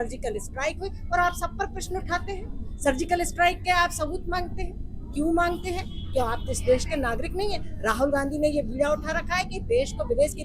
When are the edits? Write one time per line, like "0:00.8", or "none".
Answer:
none